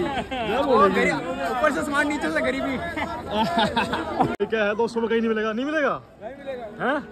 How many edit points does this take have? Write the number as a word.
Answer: one